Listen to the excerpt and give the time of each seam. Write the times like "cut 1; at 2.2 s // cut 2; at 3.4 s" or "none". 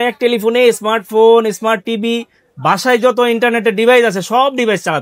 none